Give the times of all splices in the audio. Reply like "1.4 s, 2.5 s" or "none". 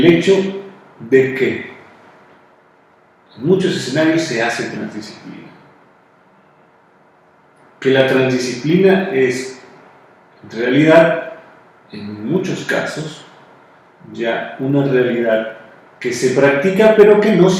2.0 s

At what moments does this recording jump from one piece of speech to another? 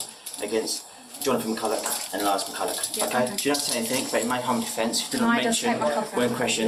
none

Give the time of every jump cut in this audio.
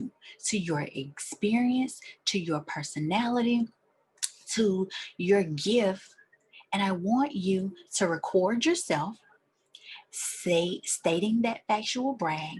none

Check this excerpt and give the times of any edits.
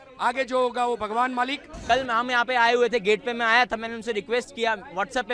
1.8 s

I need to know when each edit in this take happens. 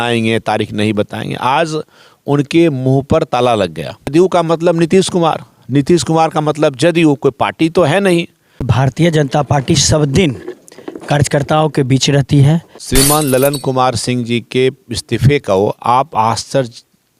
4.1 s, 8.7 s, 12.8 s

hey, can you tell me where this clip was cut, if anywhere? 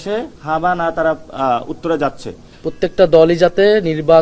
2.6 s

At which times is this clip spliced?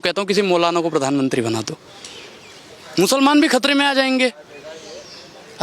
none

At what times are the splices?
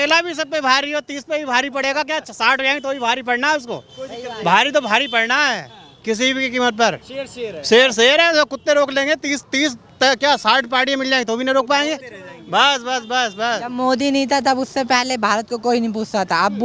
none

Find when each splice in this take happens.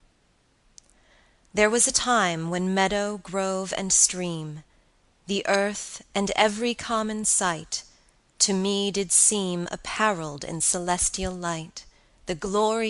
4.2 s

